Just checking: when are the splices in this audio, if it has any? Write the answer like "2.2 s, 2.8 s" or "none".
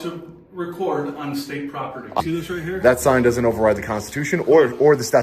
2.2 s

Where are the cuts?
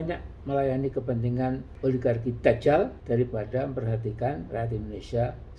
1.7 s, 3.0 s

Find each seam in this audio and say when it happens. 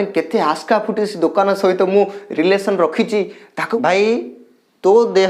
3.8 s

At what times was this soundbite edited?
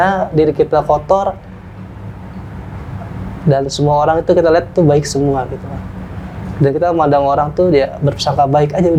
none

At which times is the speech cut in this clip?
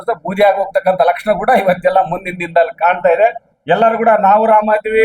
3.5 s

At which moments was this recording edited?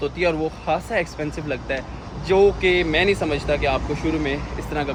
none

